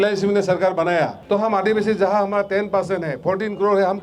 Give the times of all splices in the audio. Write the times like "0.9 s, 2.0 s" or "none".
1.2 s